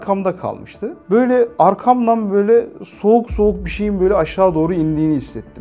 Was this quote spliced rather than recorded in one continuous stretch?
yes; 1 cut; at 1.0 s

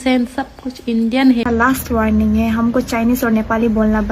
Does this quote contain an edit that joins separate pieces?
yes; 1 cut; at 1.4 s

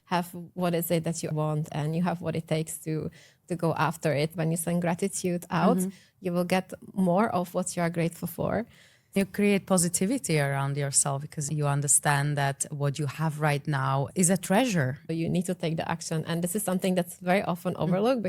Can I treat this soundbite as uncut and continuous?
no; 3 cuts; at 4.3 s, 9.2 s, 15.1 s

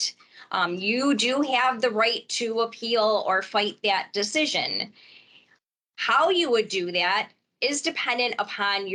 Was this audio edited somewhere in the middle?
no; 0 cuts

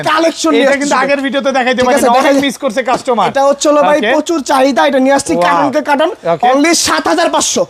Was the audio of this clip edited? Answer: no; 0 cuts

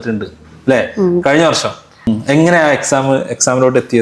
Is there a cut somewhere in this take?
yes; 1 cut; at 1.9 s

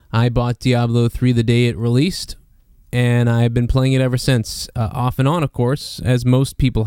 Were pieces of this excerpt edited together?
no; 0 cuts

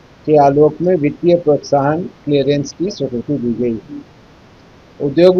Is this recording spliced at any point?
no; 0 cuts

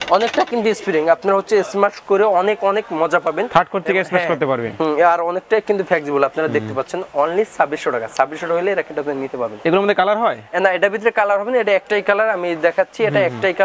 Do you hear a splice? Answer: no; 0 cuts

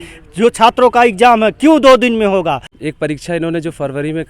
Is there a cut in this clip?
yes; 1 cut; at 2.7 s

